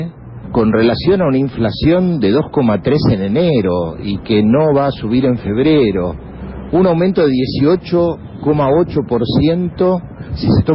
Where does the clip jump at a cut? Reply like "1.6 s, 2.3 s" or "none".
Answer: 3.3 s